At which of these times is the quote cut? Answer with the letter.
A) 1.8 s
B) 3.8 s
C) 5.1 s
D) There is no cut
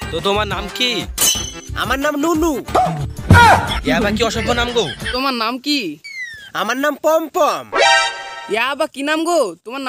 C